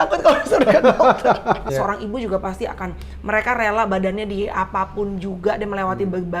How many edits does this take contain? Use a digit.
1